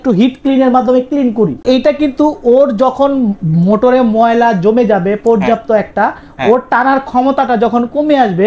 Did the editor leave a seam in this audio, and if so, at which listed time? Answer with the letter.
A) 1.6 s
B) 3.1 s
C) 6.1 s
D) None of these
A